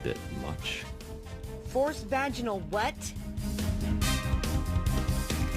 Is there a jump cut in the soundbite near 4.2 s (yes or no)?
yes